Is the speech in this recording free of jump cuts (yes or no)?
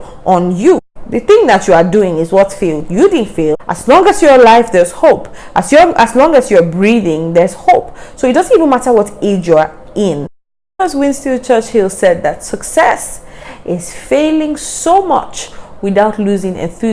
no